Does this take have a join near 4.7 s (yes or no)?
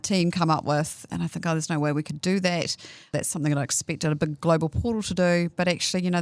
no